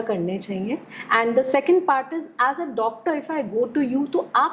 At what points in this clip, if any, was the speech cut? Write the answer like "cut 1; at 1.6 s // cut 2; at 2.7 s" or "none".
none